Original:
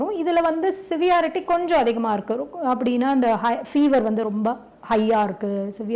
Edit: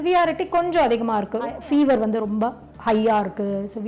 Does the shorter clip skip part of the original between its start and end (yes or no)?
yes